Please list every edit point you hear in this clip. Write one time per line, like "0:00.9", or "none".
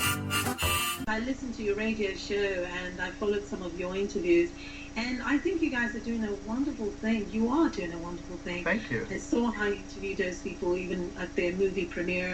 0:01.0